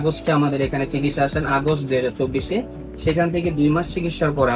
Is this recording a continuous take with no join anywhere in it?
yes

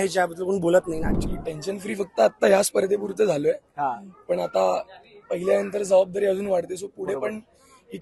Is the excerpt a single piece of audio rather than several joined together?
no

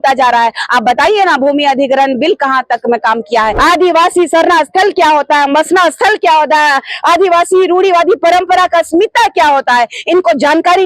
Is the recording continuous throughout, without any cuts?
no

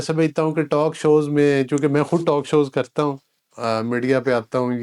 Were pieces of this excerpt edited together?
no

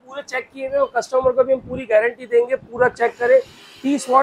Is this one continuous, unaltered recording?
yes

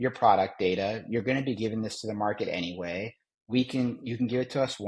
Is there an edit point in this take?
no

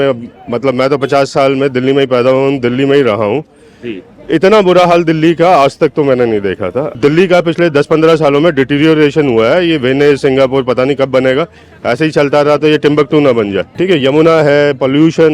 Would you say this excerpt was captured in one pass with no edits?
no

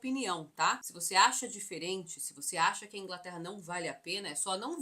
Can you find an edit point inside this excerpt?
yes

